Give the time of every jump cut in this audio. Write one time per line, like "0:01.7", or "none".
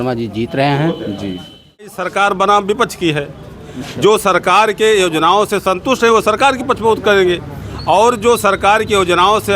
0:02.0